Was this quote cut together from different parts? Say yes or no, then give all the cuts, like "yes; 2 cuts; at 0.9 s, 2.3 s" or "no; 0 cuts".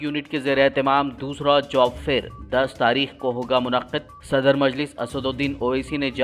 no; 0 cuts